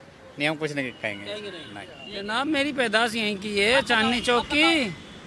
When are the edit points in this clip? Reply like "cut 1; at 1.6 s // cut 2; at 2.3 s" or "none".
cut 1; at 2.4 s